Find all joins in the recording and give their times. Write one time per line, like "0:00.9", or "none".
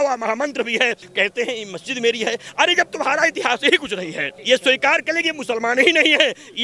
0:01.1
0:04.3